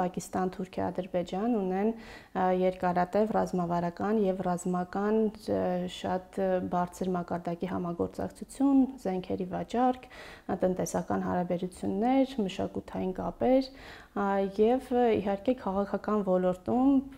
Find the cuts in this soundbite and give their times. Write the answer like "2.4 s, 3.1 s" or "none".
none

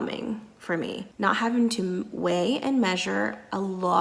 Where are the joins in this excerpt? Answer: 1.1 s

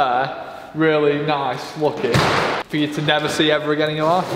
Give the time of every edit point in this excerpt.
2.6 s

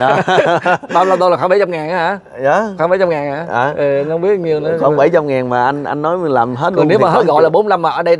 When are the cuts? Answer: none

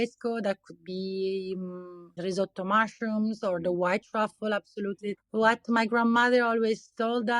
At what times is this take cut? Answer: 2.2 s, 5.2 s

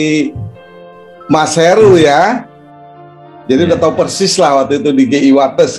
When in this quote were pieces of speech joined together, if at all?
none

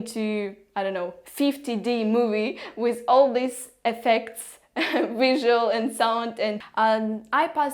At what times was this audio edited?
6.6 s

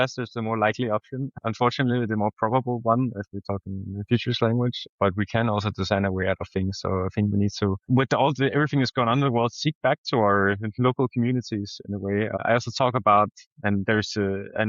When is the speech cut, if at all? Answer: none

